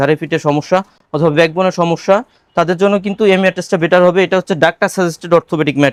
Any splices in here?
no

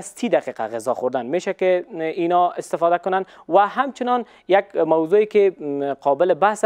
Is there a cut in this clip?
no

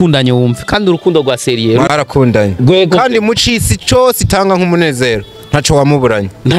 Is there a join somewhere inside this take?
yes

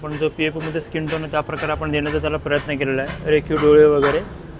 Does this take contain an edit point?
no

